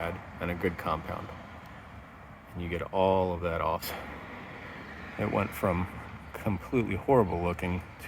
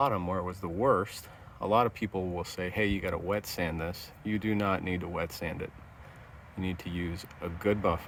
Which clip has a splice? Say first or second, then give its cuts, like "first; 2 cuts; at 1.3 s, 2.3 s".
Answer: first; 1 cut; at 3.8 s